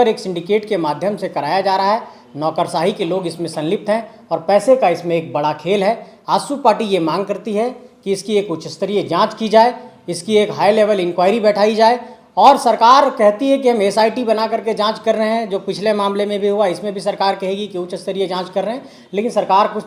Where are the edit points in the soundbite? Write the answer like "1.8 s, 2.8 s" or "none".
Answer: none